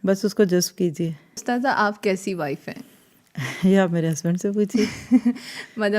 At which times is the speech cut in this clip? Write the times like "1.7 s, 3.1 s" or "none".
1.4 s